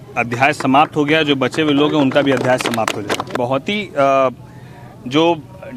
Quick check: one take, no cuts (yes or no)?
no